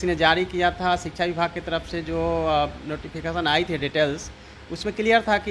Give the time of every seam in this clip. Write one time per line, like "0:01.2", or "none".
none